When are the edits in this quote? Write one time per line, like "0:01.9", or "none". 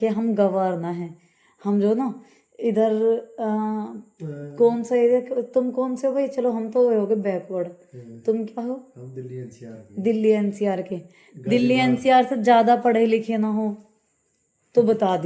none